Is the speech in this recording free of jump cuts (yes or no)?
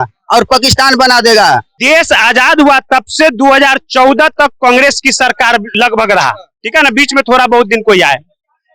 no